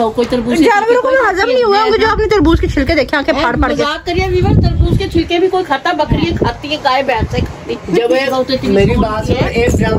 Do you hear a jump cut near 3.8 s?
no; 0 cuts

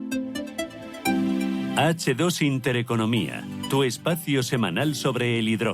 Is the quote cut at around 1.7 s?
yes; 1 cut; at 1.7 s

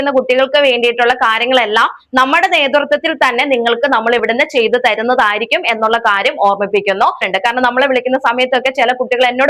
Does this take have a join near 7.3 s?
yes; 1 cut; at 7.3 s

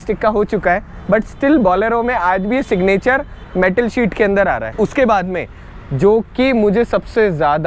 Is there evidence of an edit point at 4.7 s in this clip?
yes; 1 cut; at 4.7 s

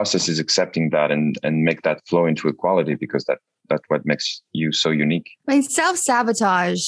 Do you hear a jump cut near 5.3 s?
yes; 1 cut; at 5.3 s

